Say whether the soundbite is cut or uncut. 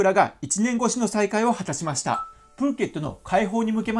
cut